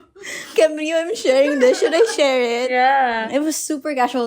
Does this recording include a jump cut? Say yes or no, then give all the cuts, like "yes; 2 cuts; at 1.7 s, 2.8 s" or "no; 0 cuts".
yes; 2 cuts; at 2.7 s, 3.2 s